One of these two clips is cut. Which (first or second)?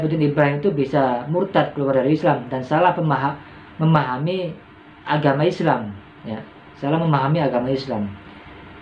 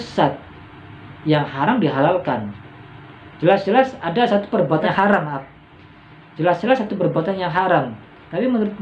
second